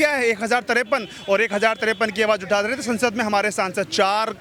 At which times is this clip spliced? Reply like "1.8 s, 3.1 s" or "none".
none